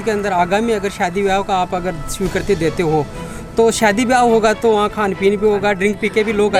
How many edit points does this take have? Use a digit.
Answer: 0